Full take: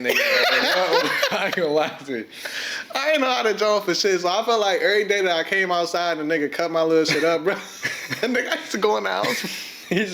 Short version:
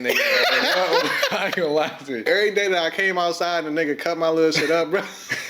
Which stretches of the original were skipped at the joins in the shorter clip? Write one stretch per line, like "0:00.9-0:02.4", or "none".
0:02.3-0:04.8